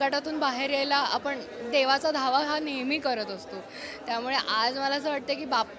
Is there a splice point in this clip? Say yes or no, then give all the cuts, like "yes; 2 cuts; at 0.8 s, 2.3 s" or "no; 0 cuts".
no; 0 cuts